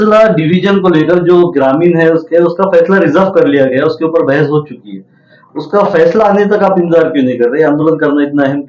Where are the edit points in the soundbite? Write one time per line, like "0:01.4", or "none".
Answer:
none